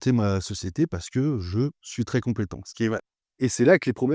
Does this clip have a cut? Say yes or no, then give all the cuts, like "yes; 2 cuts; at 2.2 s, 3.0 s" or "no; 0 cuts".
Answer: yes; 1 cut; at 3.2 s